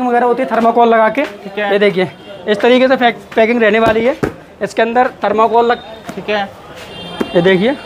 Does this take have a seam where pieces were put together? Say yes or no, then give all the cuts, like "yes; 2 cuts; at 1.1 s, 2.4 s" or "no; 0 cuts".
no; 0 cuts